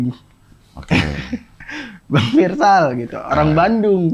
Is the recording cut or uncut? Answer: uncut